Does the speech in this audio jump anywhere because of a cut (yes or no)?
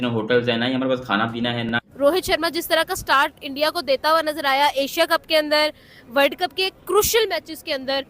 yes